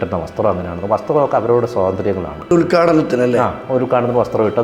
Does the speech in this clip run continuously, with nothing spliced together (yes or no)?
no